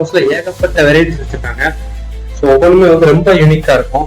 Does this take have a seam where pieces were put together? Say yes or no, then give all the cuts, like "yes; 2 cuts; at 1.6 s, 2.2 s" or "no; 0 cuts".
no; 0 cuts